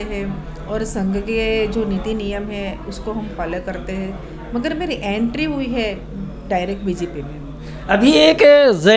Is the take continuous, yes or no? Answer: yes